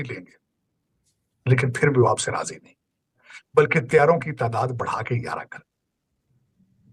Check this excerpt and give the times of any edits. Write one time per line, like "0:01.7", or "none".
0:03.3